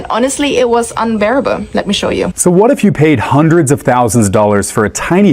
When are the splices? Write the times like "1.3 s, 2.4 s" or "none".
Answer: 2.3 s